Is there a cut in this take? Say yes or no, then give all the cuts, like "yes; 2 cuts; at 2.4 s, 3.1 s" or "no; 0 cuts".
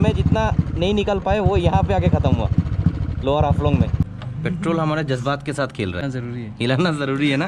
yes; 2 cuts; at 4.0 s, 6.0 s